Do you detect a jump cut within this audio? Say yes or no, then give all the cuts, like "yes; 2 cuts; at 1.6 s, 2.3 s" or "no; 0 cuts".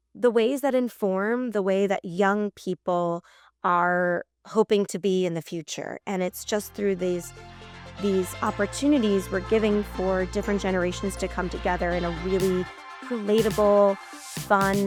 no; 0 cuts